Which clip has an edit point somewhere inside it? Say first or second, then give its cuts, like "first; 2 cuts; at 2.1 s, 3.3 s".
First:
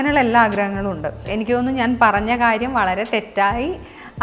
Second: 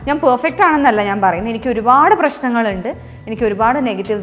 first; 1 cut; at 1.3 s